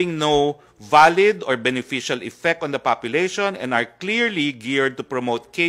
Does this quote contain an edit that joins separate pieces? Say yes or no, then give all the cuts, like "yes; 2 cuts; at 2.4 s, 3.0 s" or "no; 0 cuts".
no; 0 cuts